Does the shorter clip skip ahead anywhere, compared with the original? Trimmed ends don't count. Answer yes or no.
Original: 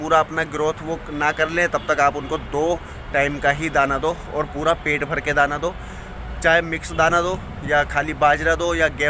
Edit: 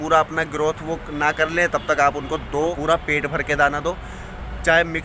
yes